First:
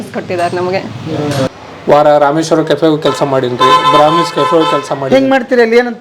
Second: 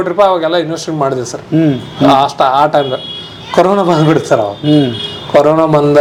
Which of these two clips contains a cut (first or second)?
first